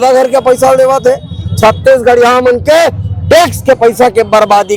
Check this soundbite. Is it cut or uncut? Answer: uncut